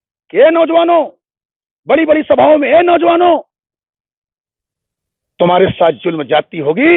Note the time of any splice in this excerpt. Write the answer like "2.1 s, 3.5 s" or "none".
none